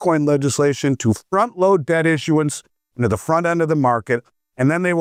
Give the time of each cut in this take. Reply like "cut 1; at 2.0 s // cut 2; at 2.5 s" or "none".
none

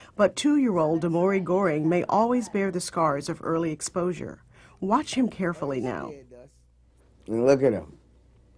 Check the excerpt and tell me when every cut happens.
cut 1; at 3.1 s

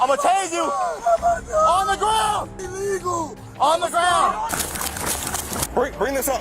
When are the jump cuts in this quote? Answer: cut 1; at 1.0 s // cut 2; at 4.5 s

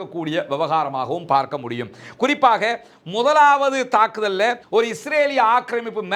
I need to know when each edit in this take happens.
none

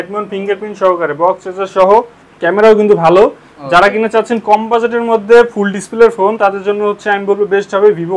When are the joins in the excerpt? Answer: cut 1; at 2.2 s

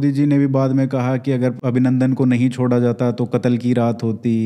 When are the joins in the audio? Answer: cut 1; at 1.6 s

